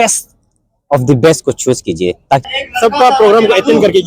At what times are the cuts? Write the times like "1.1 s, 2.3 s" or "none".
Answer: 2.4 s

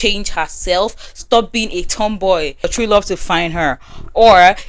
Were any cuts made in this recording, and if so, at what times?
2.6 s

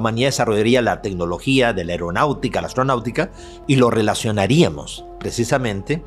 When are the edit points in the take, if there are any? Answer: 3.5 s

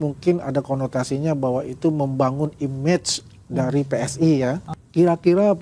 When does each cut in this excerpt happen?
4.7 s

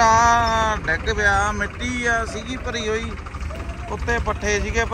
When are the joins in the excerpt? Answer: none

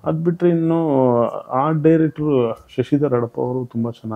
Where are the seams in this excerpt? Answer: none

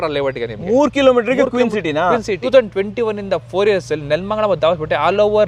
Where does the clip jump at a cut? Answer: 2.3 s

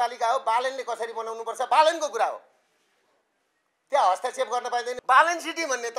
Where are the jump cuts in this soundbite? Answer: 4.9 s

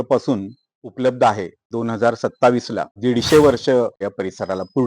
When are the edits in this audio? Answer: 1.7 s, 2.9 s, 4.0 s

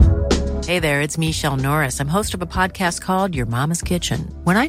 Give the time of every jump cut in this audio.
none

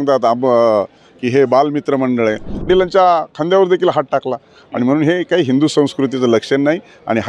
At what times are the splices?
2.5 s

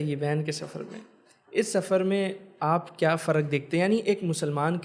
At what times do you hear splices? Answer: none

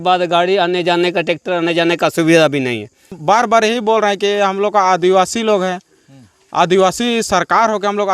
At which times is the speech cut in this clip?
3.2 s

